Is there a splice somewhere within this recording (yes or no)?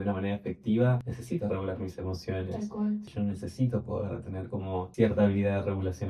yes